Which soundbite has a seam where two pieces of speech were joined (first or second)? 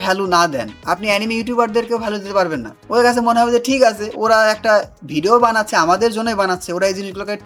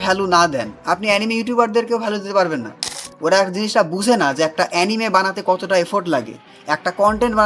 second